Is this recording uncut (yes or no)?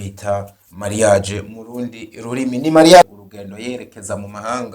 no